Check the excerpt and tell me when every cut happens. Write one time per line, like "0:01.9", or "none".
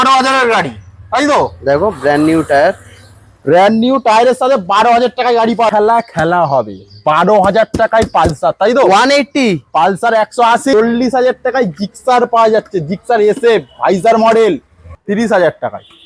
0:05.7
0:10.7
0:15.0